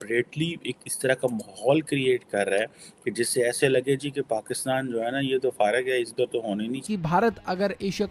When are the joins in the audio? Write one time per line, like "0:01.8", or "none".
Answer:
0:06.8